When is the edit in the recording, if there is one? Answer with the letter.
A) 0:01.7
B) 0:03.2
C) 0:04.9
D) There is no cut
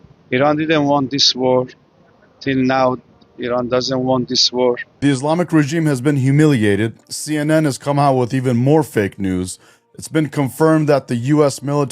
C